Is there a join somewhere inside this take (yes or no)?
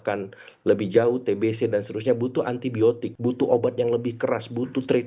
yes